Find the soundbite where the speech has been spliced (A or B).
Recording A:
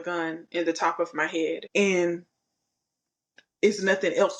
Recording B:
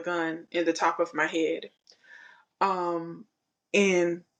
A